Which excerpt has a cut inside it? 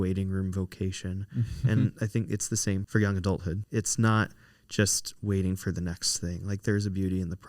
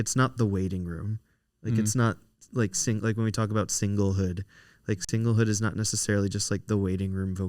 first; 2 cuts; at 2.8 s, 3.6 s

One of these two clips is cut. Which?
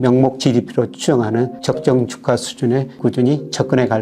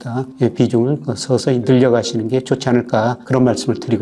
first; 2 cuts; at 1.6 s, 3.0 s

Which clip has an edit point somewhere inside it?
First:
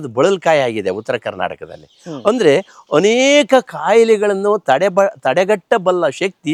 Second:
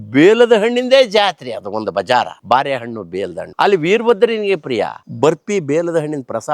second; 2 cuts; at 3.4 s, 5.0 s

